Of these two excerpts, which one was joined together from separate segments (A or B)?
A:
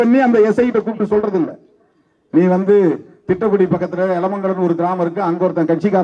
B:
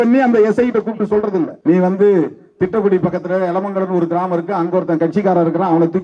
B